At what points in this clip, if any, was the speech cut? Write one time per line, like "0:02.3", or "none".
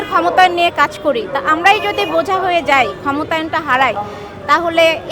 none